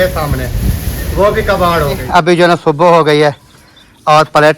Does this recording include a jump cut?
yes; 1 cut; at 2.0 s

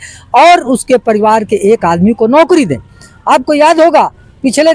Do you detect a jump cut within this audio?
no; 0 cuts

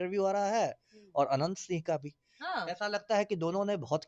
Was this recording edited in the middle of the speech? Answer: no; 0 cuts

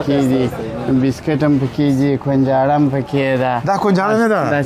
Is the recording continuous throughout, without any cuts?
yes; 0 cuts

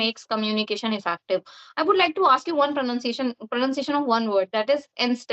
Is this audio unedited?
yes; 0 cuts

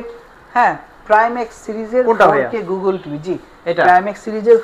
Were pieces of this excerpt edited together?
no; 0 cuts

